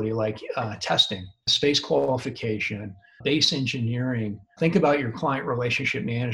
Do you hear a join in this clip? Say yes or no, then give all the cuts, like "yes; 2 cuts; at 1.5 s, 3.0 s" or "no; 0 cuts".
yes; 3 cuts; at 1.5 s, 3.0 s, 4.5 s